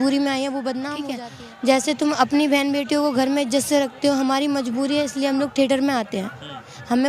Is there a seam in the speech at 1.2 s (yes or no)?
yes